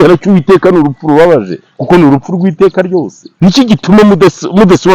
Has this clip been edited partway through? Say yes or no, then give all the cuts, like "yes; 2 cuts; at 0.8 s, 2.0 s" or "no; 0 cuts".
yes; 1 cut; at 3.2 s